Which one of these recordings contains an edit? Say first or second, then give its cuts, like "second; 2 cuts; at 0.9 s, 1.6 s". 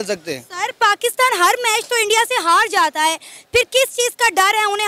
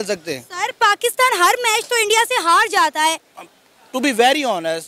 second; 1 cut; at 3.3 s